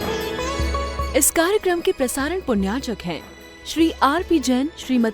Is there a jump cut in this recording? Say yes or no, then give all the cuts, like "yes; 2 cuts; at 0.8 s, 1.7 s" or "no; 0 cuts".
yes; 1 cut; at 1.0 s